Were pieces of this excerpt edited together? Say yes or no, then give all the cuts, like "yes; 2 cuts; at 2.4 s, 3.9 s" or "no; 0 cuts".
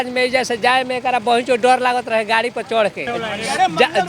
yes; 1 cut; at 3.0 s